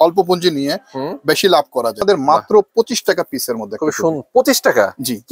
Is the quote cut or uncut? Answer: cut